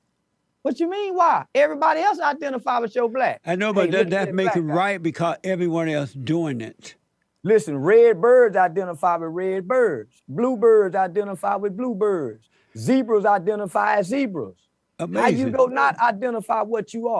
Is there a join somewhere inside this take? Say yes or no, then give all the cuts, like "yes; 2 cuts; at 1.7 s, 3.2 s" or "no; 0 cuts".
no; 0 cuts